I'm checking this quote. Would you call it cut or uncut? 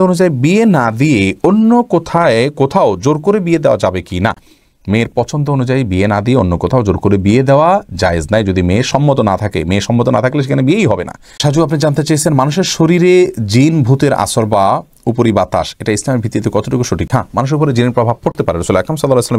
uncut